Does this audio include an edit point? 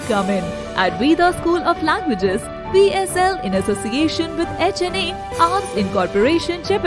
no; 0 cuts

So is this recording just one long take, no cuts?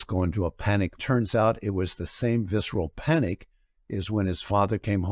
no; 1 cut; at 0.9 s

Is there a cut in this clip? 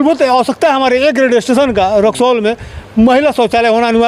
no; 0 cuts

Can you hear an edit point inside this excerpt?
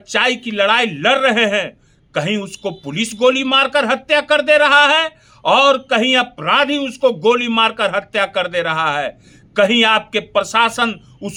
no; 0 cuts

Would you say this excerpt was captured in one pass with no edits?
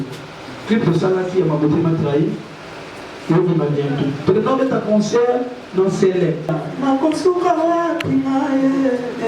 no; 1 cut; at 6.6 s

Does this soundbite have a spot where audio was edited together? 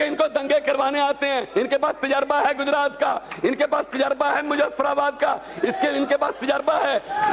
no; 0 cuts

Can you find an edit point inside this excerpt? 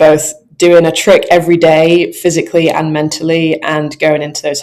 no; 0 cuts

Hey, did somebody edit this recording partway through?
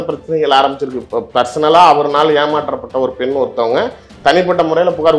yes; 1 cut; at 0.9 s

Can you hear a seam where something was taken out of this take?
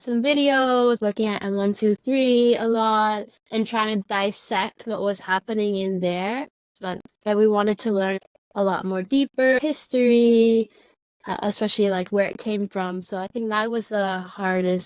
yes; 4 cuts; at 1.0 s, 6.8 s, 8.2 s, 9.6 s

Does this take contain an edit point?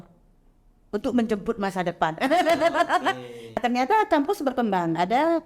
yes; 1 cut; at 3.6 s

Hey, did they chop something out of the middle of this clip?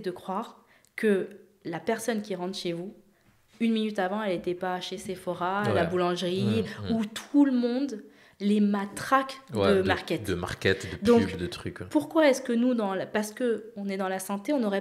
no; 0 cuts

